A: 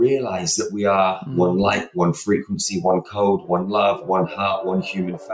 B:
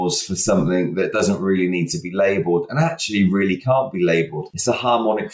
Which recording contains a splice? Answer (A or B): B